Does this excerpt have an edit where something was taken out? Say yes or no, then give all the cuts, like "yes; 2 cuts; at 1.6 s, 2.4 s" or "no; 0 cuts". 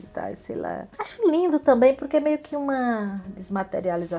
no; 0 cuts